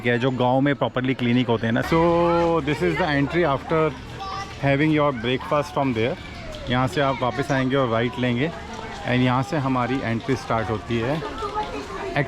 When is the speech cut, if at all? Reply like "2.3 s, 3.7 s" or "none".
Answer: 1.9 s

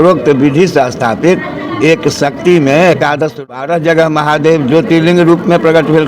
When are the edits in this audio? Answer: 3.3 s

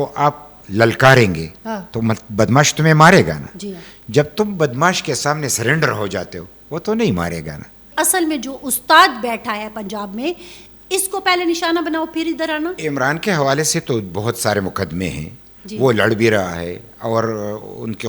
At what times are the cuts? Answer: 7.9 s, 12.8 s

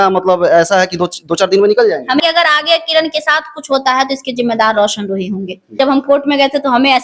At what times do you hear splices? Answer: 2.2 s, 5.7 s

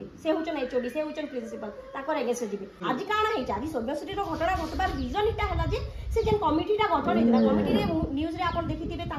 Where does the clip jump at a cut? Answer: 2.7 s

